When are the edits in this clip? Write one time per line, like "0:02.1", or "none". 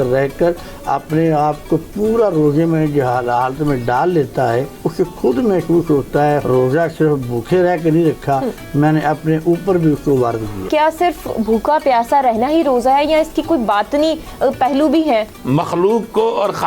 0:04.8
0:06.4
0:10.7
0:15.4